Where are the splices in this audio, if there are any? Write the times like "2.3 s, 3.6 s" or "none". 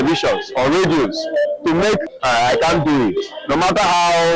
2.1 s